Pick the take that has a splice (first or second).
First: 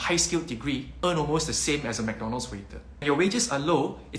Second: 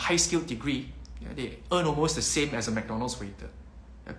first